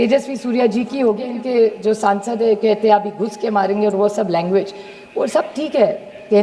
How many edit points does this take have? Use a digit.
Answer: 1